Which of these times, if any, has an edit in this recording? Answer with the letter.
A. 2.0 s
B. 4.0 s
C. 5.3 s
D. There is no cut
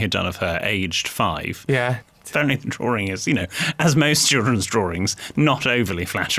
A